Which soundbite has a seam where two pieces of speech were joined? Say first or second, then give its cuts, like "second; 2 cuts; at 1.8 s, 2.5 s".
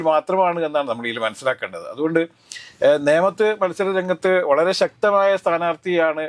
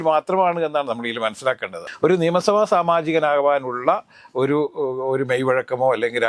second; 1 cut; at 1.8 s